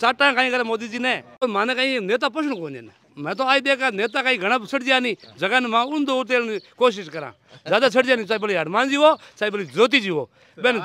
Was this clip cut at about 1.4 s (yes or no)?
yes